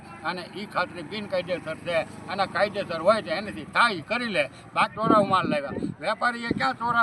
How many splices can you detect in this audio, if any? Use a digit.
1